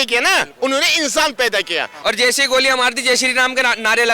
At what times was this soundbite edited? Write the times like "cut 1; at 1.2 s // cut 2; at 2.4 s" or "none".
cut 1; at 1.9 s